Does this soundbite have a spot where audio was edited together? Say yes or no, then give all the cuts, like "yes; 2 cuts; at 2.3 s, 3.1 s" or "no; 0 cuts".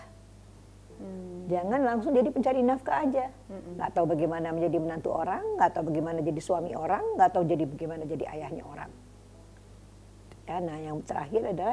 no; 0 cuts